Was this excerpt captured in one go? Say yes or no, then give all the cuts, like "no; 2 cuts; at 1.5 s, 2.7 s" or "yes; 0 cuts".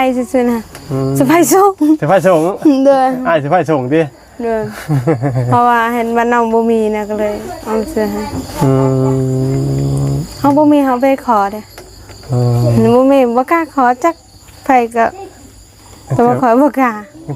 yes; 0 cuts